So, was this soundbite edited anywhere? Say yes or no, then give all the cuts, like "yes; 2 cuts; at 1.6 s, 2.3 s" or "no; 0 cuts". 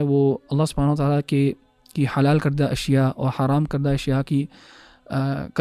no; 0 cuts